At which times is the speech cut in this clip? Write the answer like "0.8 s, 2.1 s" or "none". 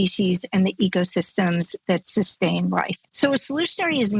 3.0 s